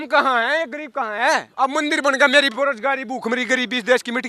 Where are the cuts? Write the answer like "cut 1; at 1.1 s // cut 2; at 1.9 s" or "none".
cut 1; at 1.5 s